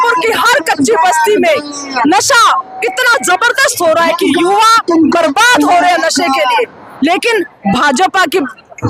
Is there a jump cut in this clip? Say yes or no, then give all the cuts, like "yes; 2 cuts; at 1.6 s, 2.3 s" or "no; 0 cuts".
no; 0 cuts